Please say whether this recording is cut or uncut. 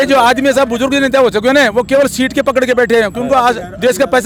uncut